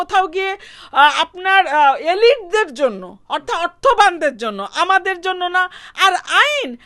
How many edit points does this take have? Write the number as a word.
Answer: zero